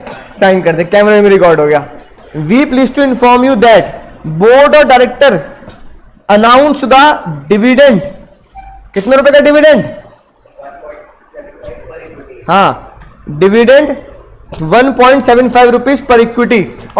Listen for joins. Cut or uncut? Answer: cut